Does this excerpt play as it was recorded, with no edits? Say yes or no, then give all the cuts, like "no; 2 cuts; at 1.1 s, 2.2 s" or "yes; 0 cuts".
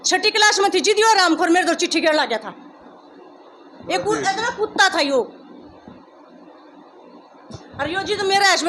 yes; 0 cuts